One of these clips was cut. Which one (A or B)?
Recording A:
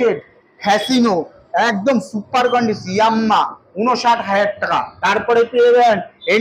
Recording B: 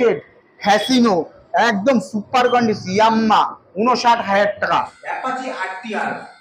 B